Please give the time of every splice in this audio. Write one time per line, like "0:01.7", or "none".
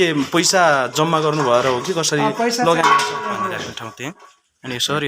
0:03.7